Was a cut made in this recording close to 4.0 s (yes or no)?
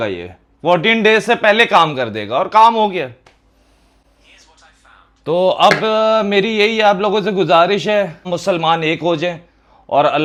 no